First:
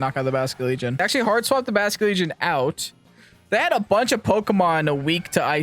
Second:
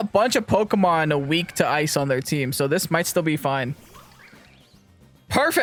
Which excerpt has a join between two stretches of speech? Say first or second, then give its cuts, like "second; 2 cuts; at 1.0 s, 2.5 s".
first; 1 cut; at 1.0 s